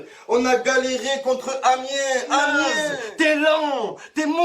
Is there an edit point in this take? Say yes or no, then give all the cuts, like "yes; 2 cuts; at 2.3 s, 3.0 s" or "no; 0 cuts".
yes; 1 cut; at 1.2 s